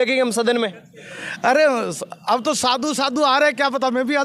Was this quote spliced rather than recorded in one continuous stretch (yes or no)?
no